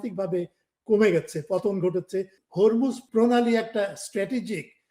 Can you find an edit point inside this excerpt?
yes; 2 cuts; at 2.4 s, 3.0 s

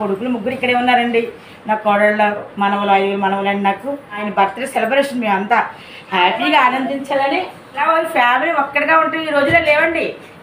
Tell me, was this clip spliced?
yes; 2 cuts; at 4.2 s, 7.8 s

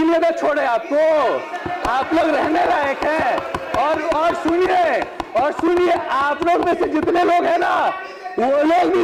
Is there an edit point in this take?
no; 0 cuts

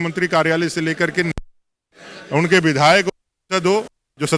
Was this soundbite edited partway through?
no; 0 cuts

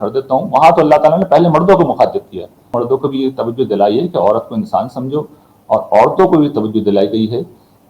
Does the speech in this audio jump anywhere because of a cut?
yes; 1 cut; at 2.8 s

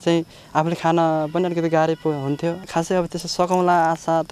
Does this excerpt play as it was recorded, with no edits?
no; 1 cut; at 2.6 s

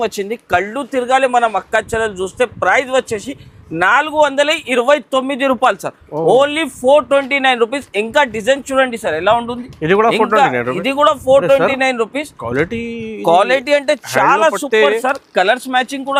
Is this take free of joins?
yes; 0 cuts

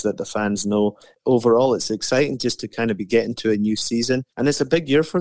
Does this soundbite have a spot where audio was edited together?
yes; 2 cuts; at 1.1 s, 4.3 s

